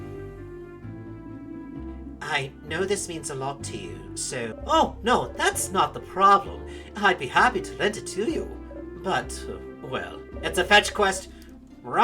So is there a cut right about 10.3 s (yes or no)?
yes